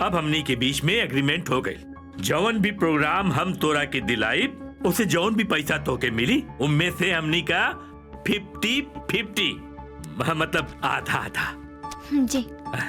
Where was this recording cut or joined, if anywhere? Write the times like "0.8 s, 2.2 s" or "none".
none

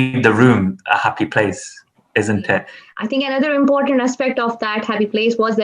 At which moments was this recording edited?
2.8 s

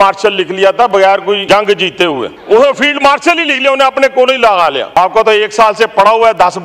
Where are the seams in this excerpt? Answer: 1.4 s, 2.3 s, 5.0 s

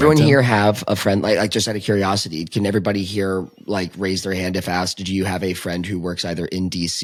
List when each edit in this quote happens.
none

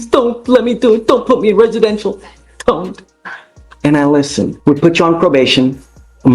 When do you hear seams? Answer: 4.6 s

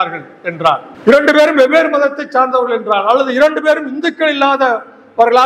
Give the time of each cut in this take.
0.9 s

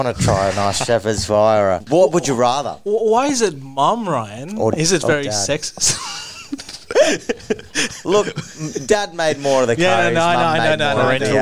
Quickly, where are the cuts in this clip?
1.8 s

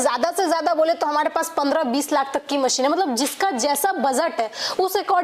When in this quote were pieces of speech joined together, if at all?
none

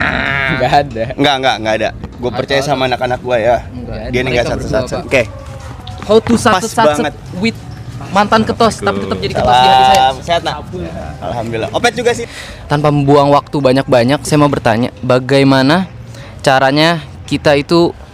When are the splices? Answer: 5.0 s, 12.2 s

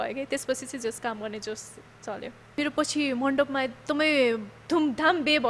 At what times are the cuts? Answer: 2.4 s

